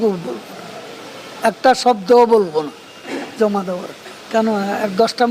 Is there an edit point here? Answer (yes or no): yes